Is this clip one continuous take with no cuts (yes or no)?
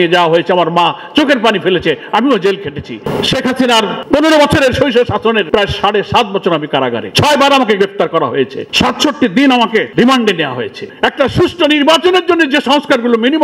no